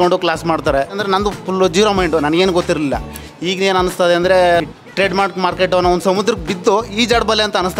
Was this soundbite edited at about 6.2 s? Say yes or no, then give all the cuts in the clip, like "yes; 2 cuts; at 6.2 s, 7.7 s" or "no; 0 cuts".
no; 2 cuts; at 1.0 s, 4.6 s